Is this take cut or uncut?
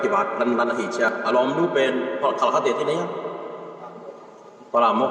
cut